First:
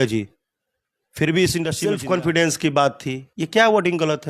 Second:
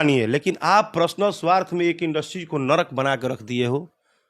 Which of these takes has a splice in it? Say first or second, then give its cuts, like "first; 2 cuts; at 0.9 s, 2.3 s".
first; 1 cut; at 1.8 s